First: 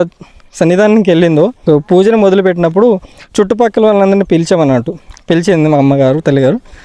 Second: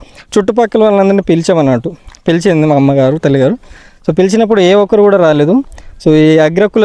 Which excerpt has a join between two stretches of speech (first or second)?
first